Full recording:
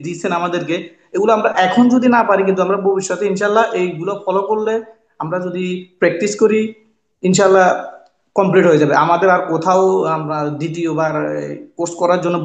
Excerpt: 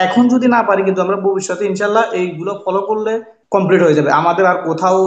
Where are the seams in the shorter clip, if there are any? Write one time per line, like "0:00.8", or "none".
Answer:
0:03.3